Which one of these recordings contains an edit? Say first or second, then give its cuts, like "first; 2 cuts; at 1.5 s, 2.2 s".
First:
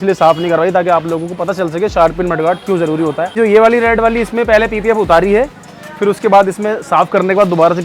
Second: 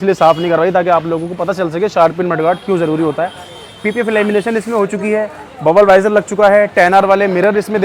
first; 1 cut; at 3.4 s